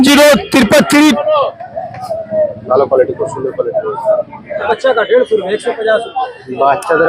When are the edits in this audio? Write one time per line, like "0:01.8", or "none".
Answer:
0:01.2
0:04.7